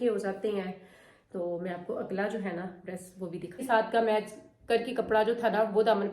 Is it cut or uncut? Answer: cut